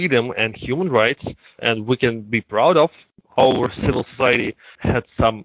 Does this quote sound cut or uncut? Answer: cut